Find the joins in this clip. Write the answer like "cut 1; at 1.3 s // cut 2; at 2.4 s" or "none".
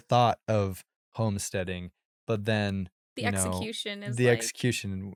none